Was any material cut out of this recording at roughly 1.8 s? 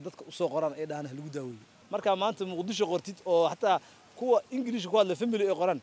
yes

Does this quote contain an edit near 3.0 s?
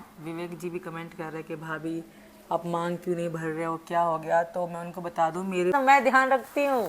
no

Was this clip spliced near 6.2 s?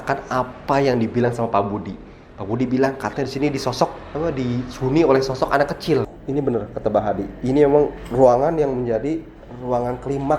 yes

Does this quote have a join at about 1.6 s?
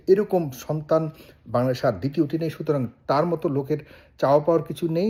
no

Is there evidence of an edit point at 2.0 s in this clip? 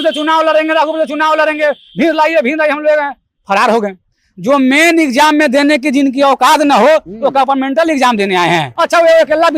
no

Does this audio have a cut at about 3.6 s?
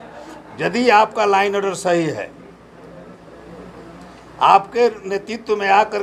no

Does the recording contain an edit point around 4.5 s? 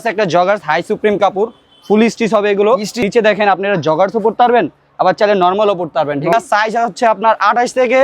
no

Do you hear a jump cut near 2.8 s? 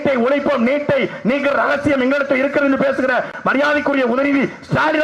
no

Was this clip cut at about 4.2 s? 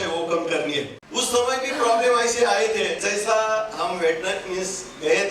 no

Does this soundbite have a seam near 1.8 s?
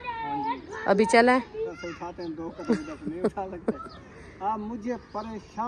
yes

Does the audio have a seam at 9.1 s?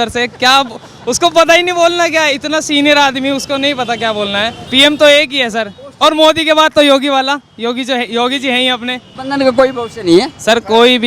yes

